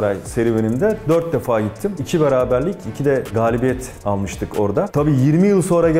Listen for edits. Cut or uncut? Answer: uncut